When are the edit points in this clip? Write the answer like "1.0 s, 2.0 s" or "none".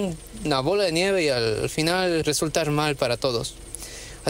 2.2 s